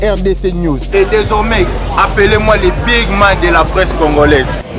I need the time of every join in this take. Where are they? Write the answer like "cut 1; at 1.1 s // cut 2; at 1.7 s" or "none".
none